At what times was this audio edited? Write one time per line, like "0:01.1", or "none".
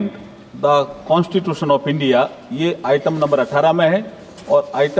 none